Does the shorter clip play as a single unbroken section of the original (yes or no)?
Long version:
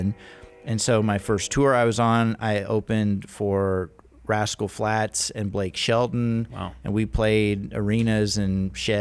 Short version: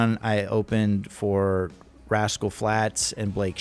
yes